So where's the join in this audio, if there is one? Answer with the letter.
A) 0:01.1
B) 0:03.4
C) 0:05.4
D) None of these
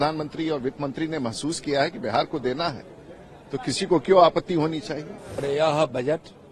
C